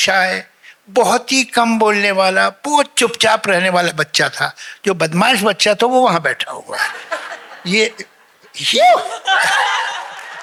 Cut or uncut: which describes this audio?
uncut